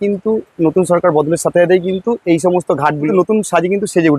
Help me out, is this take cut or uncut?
cut